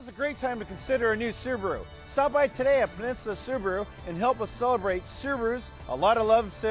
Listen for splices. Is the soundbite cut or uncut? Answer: cut